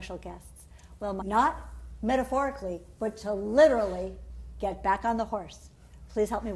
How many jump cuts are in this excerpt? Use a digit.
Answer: 0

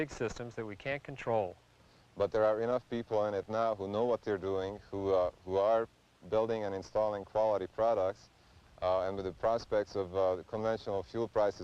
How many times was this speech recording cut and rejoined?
1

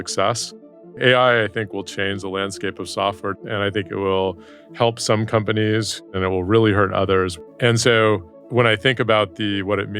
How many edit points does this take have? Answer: 5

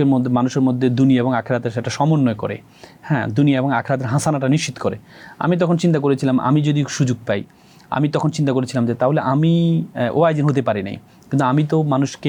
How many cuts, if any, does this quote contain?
0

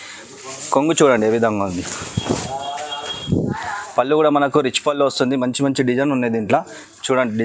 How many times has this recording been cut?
0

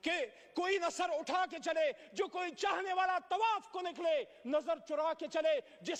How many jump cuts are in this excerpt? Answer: 0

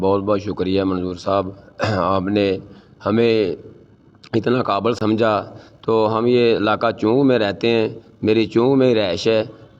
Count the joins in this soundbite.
1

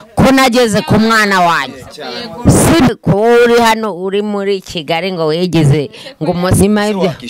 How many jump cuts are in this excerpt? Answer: 2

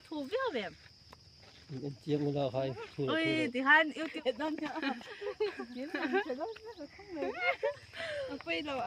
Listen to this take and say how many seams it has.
1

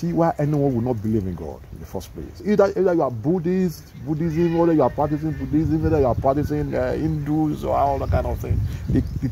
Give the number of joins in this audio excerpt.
1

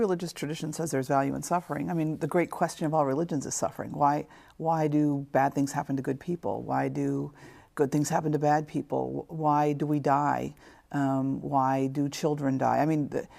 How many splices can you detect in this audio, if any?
1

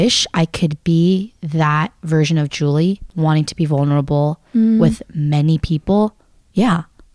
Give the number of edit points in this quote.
1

